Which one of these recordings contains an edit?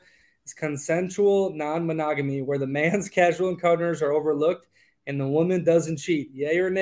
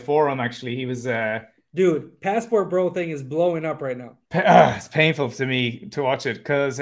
second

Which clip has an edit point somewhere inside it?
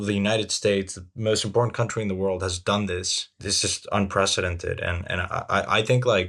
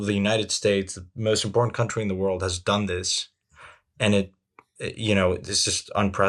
first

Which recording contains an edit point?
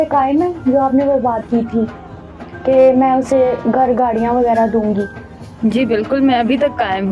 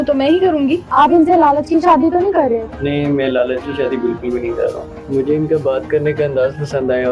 second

